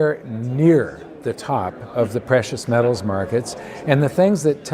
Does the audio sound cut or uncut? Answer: uncut